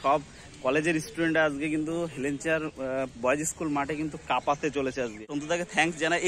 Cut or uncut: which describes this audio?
cut